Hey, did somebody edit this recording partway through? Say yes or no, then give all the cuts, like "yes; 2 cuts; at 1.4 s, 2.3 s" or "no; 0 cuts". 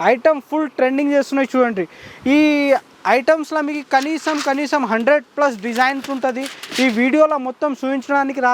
no; 0 cuts